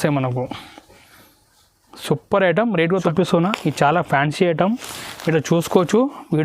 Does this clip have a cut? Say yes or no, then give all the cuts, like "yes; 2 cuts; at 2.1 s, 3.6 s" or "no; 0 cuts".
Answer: yes; 1 cut; at 3.1 s